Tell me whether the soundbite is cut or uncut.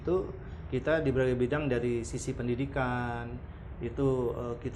uncut